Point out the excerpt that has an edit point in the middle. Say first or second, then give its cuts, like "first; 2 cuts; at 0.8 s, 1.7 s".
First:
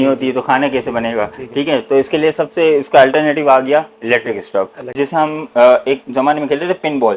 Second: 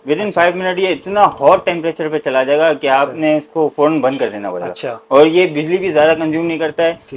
first; 1 cut; at 4.9 s